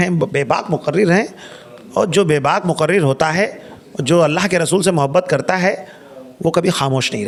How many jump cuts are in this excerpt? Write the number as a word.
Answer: zero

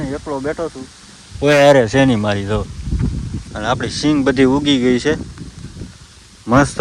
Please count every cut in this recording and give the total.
zero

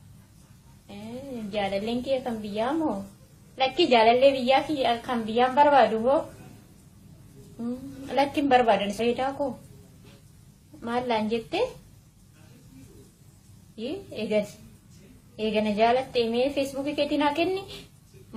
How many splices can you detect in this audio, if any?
zero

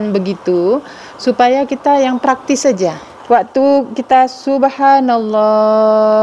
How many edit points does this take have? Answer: one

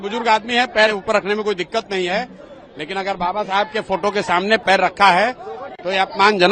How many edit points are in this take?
zero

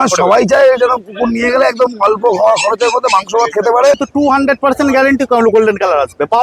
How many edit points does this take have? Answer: one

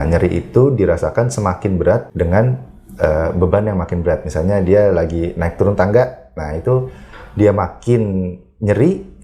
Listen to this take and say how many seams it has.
one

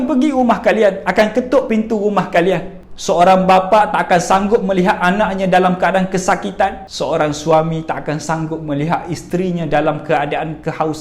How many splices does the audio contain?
two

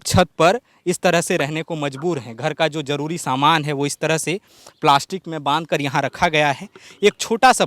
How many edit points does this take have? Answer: zero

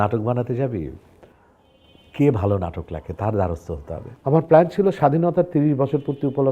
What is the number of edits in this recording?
one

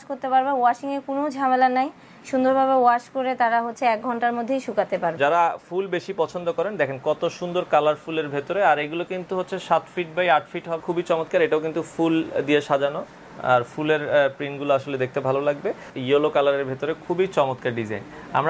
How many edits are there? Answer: three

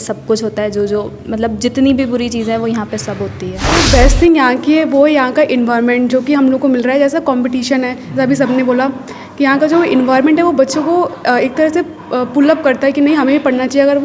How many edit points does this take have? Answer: one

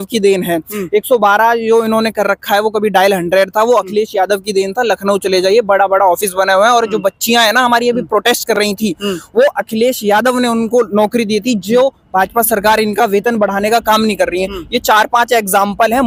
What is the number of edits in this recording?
zero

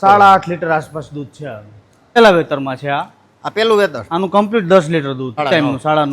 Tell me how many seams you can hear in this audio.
two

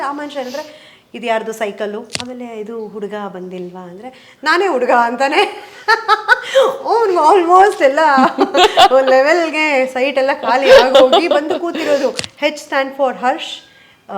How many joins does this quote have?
two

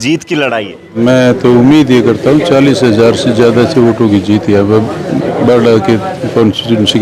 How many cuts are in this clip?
one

